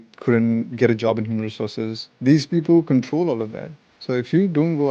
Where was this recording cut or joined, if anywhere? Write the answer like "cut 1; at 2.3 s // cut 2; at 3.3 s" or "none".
cut 1; at 2.0 s